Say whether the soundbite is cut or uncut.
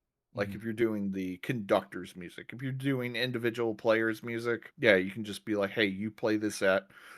cut